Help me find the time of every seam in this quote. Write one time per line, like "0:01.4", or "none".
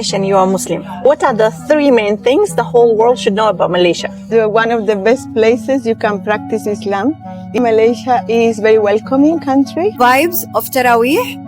0:10.0